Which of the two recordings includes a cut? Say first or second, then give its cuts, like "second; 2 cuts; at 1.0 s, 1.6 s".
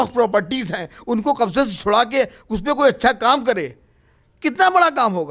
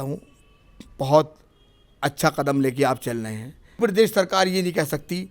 second; 1 cut; at 3.8 s